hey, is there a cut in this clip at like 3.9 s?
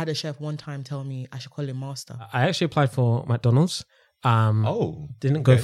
no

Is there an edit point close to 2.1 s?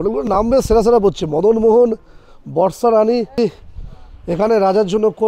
no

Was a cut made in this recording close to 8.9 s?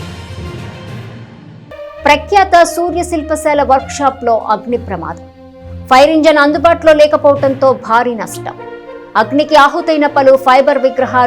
no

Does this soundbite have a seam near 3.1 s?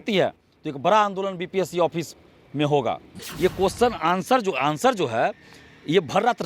yes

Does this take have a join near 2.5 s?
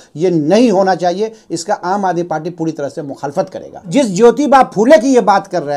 no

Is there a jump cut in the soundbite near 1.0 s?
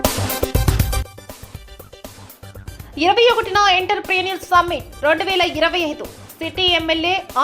yes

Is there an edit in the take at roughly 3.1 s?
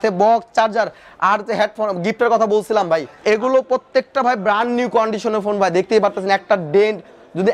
yes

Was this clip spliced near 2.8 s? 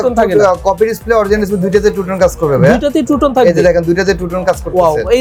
no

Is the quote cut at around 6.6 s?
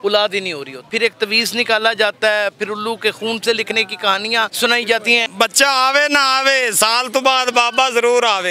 no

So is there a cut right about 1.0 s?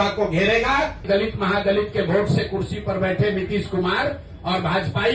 yes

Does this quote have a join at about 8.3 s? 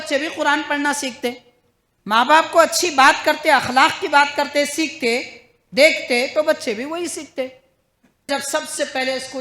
yes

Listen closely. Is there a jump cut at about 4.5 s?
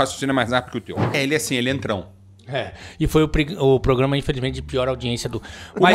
no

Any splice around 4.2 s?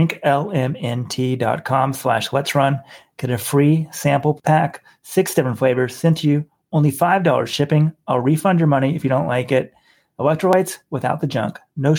yes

